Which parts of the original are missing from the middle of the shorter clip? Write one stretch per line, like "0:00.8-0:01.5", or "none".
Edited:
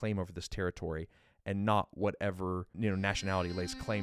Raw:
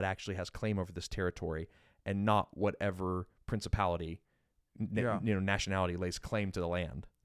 0:03.4-0:05.2